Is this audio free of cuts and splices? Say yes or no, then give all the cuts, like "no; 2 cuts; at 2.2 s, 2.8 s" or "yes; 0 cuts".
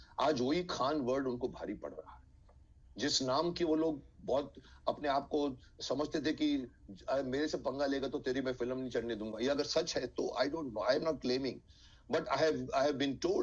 yes; 0 cuts